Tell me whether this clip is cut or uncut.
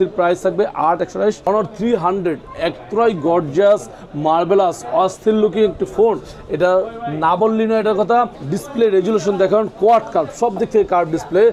cut